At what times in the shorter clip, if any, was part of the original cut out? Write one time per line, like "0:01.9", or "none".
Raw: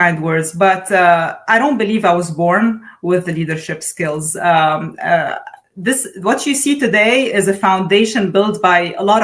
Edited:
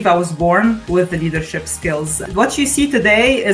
0:00.8
0:02.2